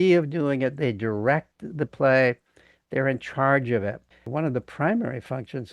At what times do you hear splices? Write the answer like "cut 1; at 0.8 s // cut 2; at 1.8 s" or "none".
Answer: cut 1; at 4.3 s